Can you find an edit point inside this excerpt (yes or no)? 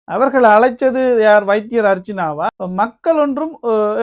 yes